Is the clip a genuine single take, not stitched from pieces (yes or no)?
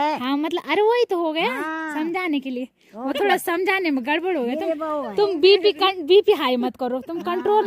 yes